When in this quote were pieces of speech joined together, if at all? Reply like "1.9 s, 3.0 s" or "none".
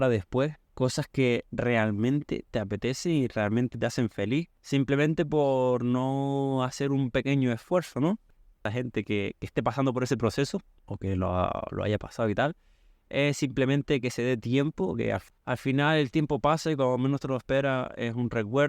8.5 s, 15.3 s